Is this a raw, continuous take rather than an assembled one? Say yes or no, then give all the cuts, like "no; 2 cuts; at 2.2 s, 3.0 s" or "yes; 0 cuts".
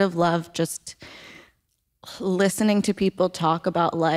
yes; 0 cuts